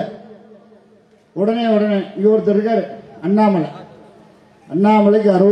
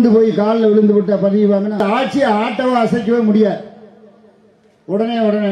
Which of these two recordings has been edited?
second; 1 cut; at 1.8 s

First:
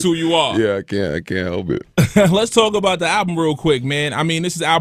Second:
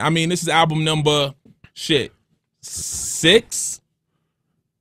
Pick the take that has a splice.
second; 1 cut; at 2.2 s

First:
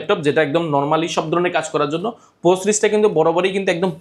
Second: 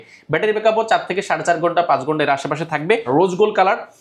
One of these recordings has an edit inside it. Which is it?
second; 1 cut; at 3.1 s

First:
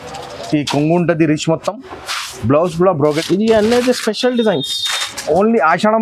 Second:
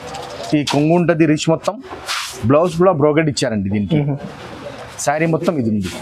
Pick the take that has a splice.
first; 1 cut; at 3.2 s

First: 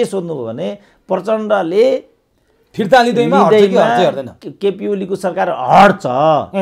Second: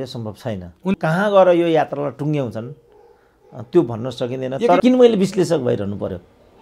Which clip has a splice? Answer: second; 2 cuts; at 0.9 s, 4.8 s

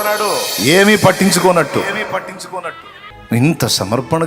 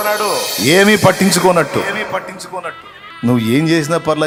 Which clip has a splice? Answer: first; 1 cut; at 3.1 s

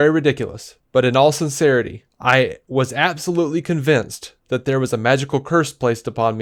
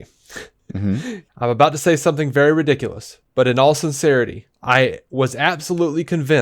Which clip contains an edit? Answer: second; 1 cut; at 1.2 s

